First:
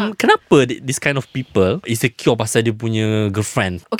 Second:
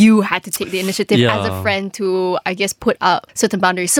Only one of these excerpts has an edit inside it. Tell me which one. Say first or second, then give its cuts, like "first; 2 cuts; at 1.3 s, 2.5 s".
first; 1 cut; at 1.9 s